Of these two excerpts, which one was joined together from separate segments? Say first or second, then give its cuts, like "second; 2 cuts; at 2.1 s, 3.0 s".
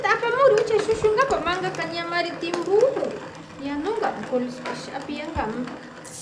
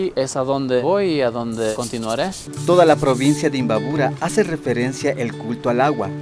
second; 1 cut; at 2.5 s